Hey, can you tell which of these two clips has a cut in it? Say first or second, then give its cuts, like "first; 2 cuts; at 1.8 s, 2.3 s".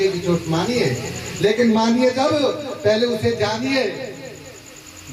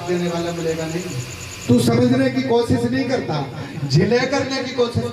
second; 1 cut; at 1.6 s